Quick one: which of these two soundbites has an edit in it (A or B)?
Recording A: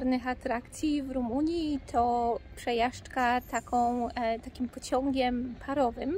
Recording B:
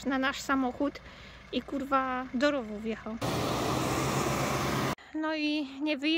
B